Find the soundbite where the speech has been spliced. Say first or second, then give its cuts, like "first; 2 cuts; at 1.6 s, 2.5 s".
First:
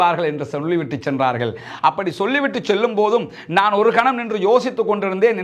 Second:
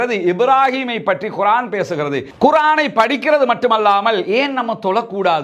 second; 1 cut; at 2.3 s